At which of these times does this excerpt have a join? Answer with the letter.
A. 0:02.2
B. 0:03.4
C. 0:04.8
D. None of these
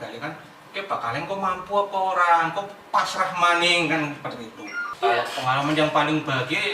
C